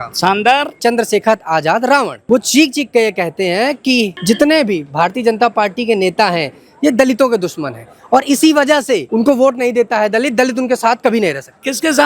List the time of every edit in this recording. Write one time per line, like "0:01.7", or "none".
0:00.8
0:04.2
0:09.1